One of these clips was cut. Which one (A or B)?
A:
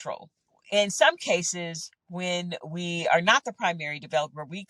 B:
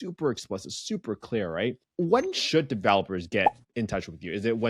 B